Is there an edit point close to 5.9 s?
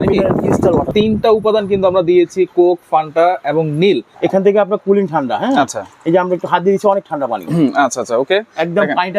no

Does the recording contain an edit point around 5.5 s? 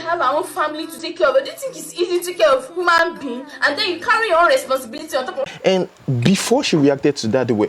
yes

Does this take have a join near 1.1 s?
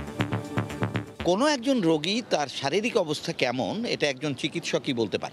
yes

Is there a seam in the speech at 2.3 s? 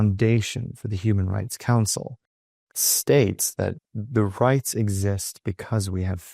yes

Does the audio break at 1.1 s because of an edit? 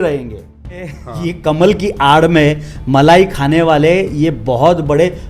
yes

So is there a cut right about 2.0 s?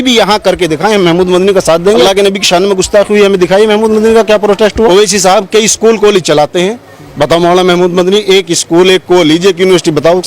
yes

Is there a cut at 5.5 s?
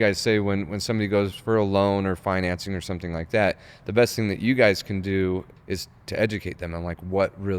yes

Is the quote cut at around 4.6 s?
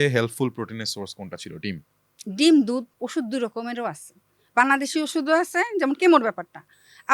no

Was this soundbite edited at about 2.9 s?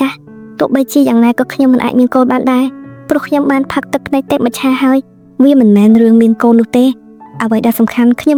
no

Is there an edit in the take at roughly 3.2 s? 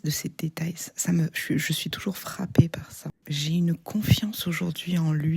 yes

